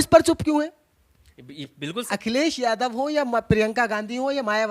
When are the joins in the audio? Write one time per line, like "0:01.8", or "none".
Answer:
0:02.0